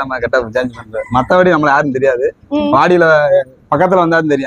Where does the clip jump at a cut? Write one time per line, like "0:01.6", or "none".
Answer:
none